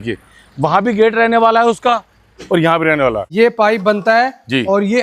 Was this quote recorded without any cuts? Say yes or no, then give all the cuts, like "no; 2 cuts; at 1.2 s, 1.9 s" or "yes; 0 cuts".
no; 1 cut; at 3.2 s